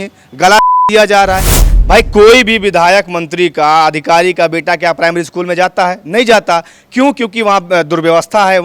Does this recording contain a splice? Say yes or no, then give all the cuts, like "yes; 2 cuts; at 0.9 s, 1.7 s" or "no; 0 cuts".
yes; 1 cut; at 1.6 s